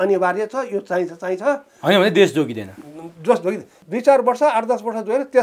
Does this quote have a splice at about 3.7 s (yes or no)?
yes